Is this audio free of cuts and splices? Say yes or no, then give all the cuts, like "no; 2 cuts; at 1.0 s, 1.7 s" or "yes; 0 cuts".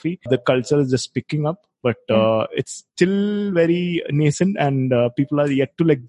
yes; 0 cuts